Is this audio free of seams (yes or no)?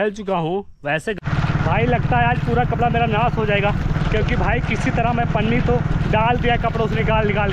no